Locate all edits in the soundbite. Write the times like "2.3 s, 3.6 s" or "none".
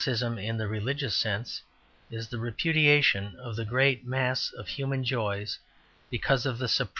3.1 s